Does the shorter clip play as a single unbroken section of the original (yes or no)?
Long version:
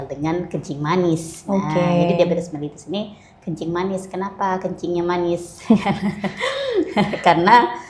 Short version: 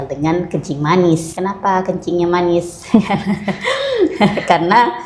no